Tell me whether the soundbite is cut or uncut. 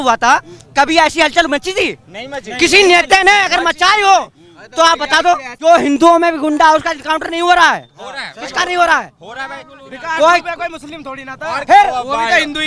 cut